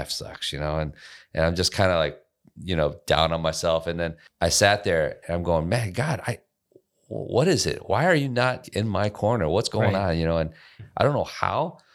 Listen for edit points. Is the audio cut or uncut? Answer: cut